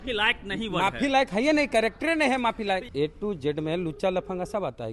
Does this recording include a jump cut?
yes; 1 cut; at 2.9 s

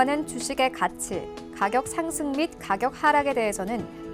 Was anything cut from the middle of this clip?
no; 0 cuts

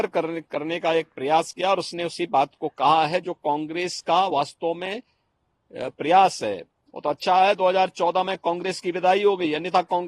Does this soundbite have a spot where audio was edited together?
no; 0 cuts

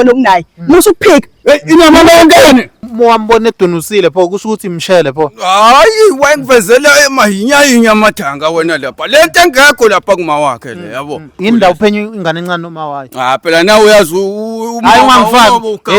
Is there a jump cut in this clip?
yes; 2 cuts; at 2.8 s, 11.3 s

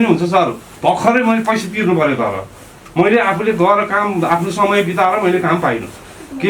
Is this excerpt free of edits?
yes; 0 cuts

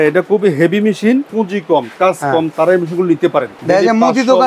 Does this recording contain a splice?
yes; 2 cuts; at 1.3 s, 3.5 s

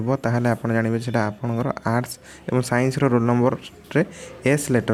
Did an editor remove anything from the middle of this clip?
no; 0 cuts

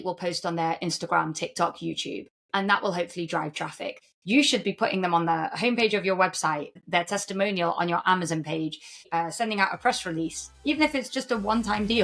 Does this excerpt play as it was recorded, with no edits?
no; 3 cuts; at 4.1 s, 6.8 s, 9.0 s

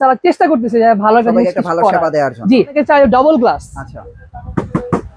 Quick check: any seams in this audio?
yes; 1 cut; at 2.7 s

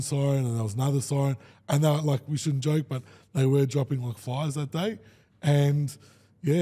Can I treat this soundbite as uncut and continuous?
yes; 0 cuts

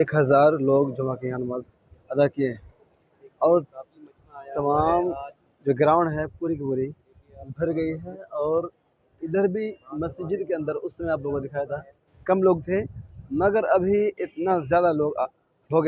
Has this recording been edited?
no; 0 cuts

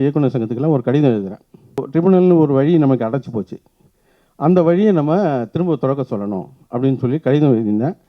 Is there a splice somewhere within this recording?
yes; 1 cut; at 1.8 s

